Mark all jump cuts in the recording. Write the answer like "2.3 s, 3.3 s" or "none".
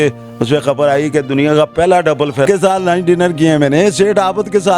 2.5 s

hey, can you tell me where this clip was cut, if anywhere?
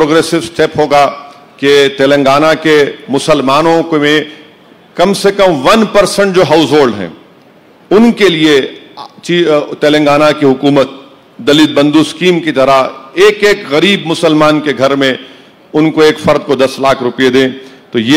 none

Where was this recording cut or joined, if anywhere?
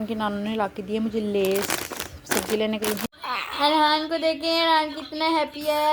3.1 s

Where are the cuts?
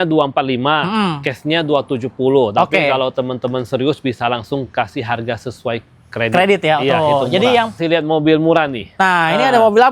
7.8 s

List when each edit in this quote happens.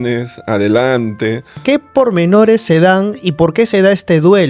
1.6 s

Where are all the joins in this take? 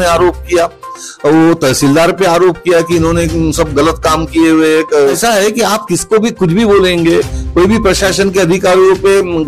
5.2 s

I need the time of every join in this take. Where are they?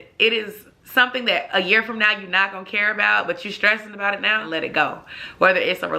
4.4 s

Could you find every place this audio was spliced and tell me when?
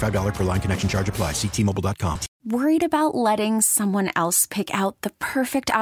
2.3 s

